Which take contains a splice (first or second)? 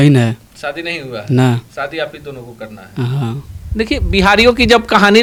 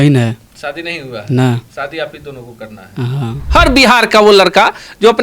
second